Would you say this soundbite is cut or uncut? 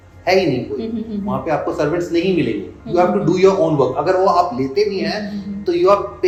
uncut